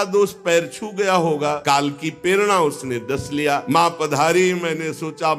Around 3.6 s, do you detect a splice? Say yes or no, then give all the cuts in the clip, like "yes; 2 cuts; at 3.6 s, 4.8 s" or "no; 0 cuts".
yes; 2 cuts; at 1.6 s, 3.6 s